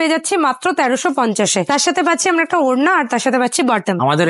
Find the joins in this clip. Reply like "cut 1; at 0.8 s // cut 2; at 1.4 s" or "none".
none